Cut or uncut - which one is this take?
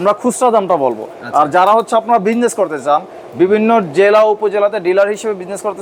uncut